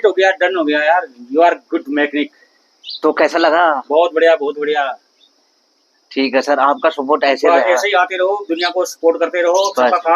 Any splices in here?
no; 0 cuts

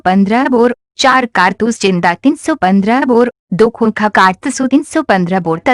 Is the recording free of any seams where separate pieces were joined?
no; 2 cuts; at 1.1 s, 3.7 s

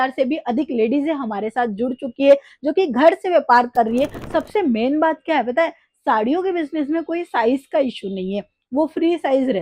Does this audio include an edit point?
yes; 1 cut; at 4.2 s

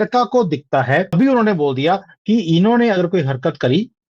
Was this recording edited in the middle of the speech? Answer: yes; 1 cut; at 1.1 s

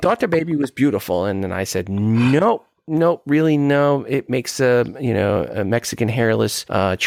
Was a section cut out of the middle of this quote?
no; 0 cuts

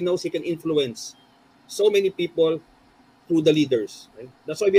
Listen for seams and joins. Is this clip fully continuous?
yes; 0 cuts

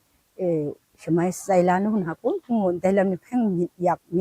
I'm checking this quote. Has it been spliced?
no; 0 cuts

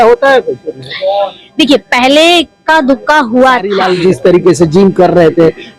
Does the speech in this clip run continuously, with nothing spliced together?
no; 1 cut; at 3.8 s

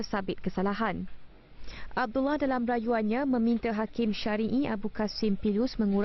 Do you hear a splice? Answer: yes; 1 cut; at 3.2 s

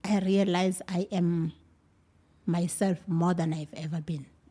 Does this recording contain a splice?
no; 0 cuts

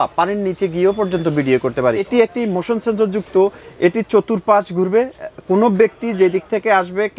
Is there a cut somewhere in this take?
yes; 1 cut; at 2.1 s

